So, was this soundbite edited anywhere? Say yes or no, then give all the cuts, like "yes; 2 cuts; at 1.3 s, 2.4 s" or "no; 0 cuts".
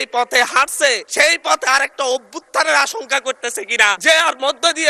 yes; 2 cuts; at 1.0 s, 4.0 s